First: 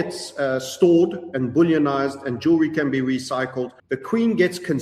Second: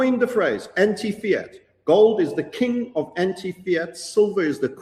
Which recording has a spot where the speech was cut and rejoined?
first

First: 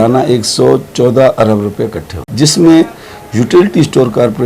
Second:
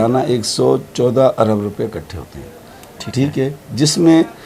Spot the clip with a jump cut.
first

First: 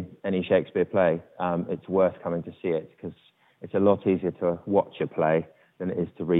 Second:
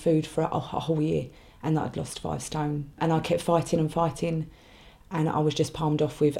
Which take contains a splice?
second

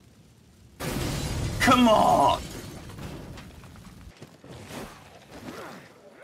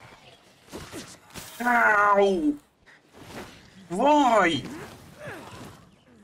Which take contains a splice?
first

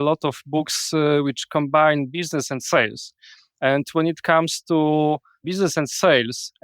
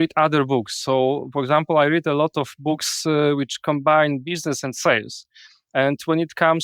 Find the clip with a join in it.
first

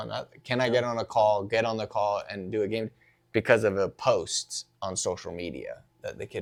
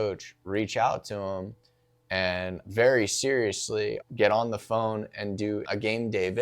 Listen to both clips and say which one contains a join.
second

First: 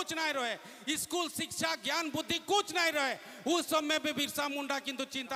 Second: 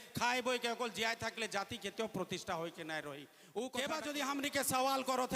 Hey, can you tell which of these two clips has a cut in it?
second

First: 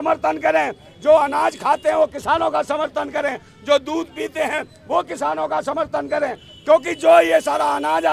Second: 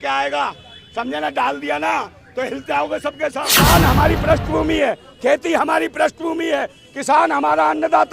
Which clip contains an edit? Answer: second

